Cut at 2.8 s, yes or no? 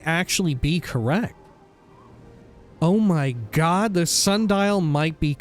yes